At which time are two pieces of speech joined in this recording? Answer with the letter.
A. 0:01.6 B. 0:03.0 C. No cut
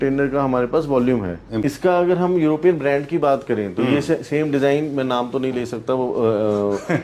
A